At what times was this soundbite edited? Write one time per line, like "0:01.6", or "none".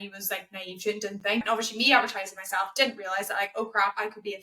0:01.4